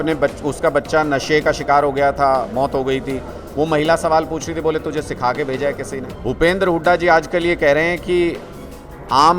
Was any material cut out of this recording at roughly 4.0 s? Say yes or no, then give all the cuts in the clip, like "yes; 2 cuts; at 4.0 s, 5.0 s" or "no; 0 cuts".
no; 1 cut; at 6.1 s